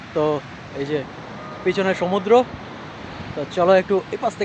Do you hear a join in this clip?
no; 0 cuts

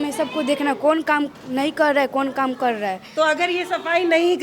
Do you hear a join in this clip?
no; 0 cuts

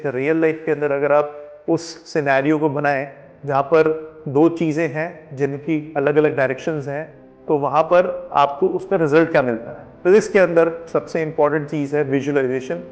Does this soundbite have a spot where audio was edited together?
yes; 1 cut; at 10.0 s

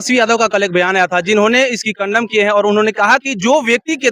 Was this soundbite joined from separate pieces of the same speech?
no; 0 cuts

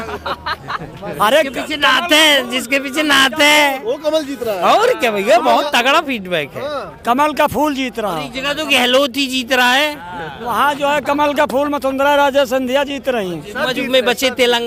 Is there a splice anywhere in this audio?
no; 0 cuts

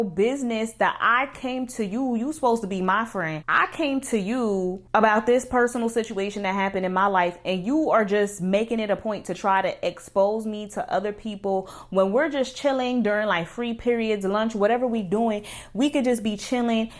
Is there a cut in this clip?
no; 0 cuts

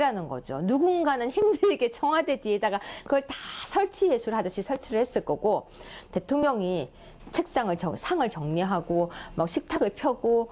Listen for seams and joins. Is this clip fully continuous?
no; 1 cut; at 1.1 s

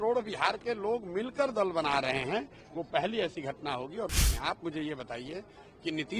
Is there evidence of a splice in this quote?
yes; 1 cut; at 4.1 s

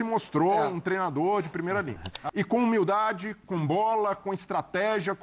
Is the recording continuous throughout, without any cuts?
no; 1 cut; at 2.1 s

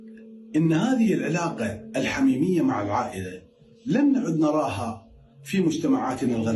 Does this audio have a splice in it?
no; 0 cuts

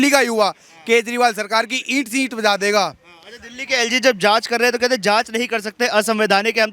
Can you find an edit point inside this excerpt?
no; 0 cuts

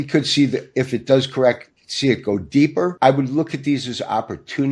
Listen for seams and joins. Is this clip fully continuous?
no; 1 cut; at 2.9 s

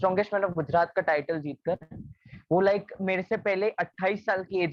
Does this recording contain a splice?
no; 0 cuts

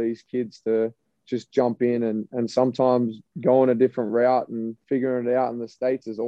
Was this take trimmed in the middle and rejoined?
yes; 2 cuts; at 3.2 s, 4.7 s

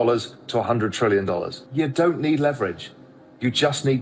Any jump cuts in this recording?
yes; 1 cut; at 1.6 s

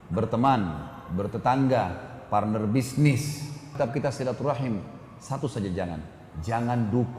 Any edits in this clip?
yes; 1 cut; at 3.7 s

